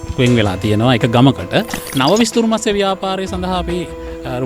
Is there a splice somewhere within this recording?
yes; 1 cut; at 1.8 s

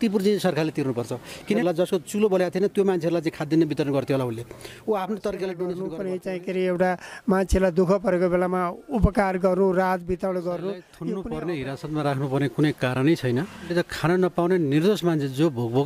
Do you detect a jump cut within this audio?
yes; 4 cuts; at 1.6 s, 5.9 s, 10.9 s, 13.7 s

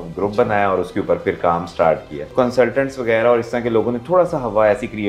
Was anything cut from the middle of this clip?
yes; 1 cut; at 2.2 s

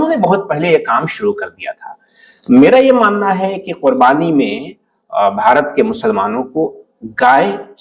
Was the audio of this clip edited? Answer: no; 0 cuts

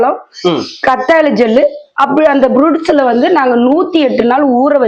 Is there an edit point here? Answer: no; 0 cuts

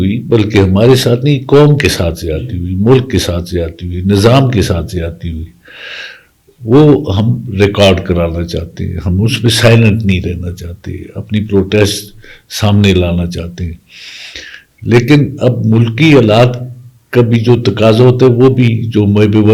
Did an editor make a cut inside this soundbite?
no; 0 cuts

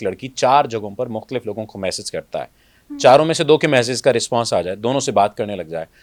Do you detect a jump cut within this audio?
no; 0 cuts

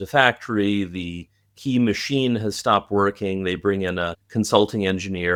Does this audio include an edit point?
no; 0 cuts

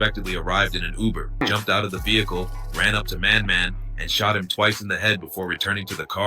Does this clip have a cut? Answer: yes; 1 cut; at 1.4 s

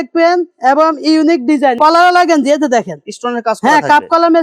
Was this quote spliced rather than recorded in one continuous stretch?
yes; 1 cut; at 1.8 s

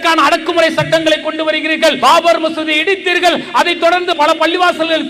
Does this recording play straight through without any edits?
no; 2 cuts; at 2.0 s, 4.2 s

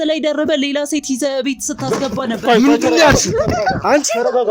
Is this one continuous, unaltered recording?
yes; 0 cuts

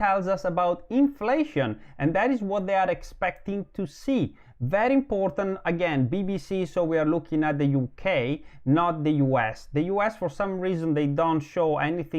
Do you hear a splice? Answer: no; 0 cuts

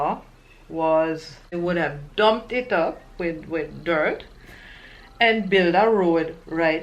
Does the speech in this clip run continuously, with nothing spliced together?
no; 1 cut; at 1.5 s

